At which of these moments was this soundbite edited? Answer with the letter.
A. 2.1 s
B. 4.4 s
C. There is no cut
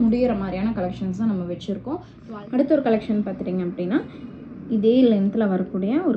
A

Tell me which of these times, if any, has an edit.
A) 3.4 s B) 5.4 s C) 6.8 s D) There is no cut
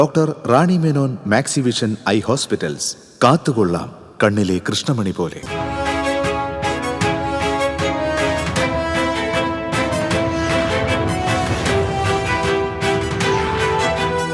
B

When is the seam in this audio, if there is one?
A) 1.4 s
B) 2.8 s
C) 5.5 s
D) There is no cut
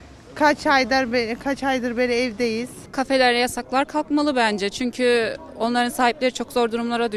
B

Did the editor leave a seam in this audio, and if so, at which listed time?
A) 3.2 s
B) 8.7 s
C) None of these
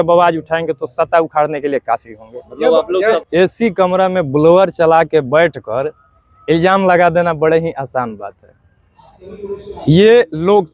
A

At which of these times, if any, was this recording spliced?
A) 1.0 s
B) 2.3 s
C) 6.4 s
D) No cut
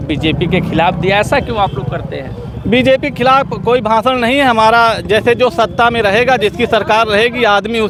D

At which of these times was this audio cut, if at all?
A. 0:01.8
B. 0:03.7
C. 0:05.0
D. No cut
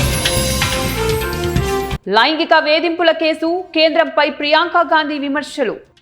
A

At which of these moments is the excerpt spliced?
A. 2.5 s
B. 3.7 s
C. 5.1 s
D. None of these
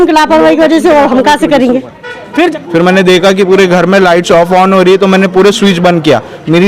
A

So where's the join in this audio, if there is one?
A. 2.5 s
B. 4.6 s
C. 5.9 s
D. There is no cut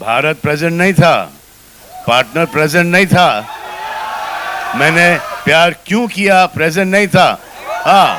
D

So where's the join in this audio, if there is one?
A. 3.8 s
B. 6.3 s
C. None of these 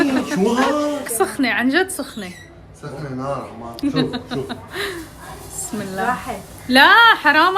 A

